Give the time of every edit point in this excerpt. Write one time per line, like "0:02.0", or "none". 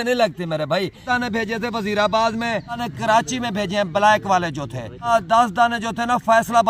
0:01.0
0:02.9
0:05.1